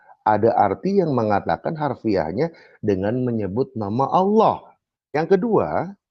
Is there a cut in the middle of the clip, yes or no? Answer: yes